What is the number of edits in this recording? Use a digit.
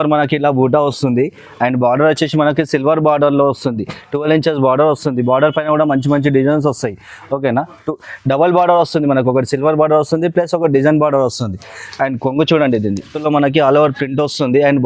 1